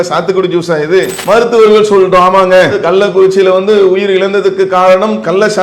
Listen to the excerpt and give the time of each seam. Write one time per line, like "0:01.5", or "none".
0:01.2